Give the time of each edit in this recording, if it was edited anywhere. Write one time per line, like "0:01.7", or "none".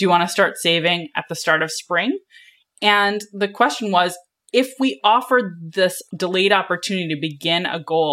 0:06.0